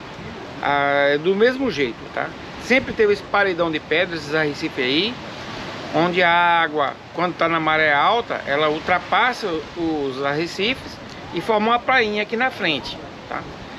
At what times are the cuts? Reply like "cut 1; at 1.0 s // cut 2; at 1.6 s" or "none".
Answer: none